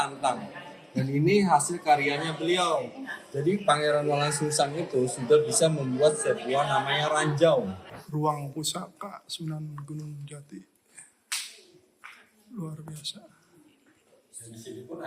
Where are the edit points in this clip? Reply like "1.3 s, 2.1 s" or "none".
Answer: 8.0 s